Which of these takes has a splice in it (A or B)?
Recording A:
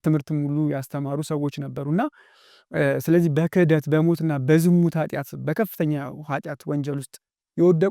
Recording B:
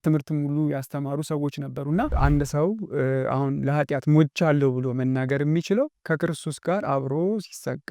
B